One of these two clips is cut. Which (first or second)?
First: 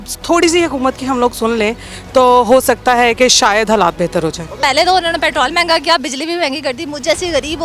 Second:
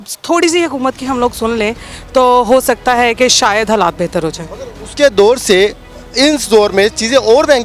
first